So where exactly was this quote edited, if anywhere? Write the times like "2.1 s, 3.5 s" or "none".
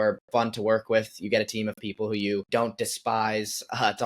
2.5 s